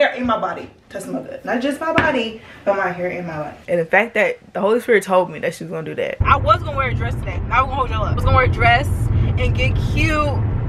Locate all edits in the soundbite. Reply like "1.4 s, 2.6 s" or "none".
3.4 s, 6.2 s